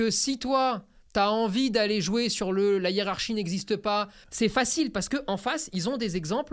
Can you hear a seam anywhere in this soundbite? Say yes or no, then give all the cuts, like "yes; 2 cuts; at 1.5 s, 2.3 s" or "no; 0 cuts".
yes; 1 cut; at 4.2 s